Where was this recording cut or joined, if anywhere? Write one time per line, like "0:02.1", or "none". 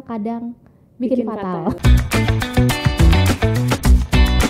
0:01.8